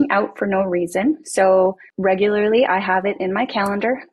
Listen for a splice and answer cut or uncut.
cut